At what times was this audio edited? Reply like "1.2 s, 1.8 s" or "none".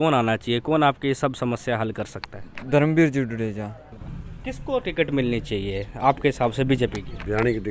3.9 s